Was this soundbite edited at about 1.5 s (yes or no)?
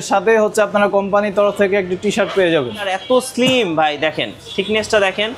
no